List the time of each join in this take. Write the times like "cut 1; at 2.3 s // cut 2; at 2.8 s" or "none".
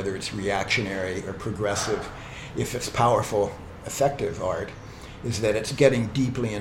cut 1; at 5.7 s